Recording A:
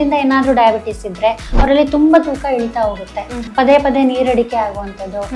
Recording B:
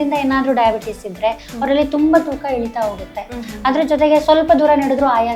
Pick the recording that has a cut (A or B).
A